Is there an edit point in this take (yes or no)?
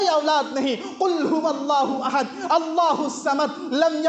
no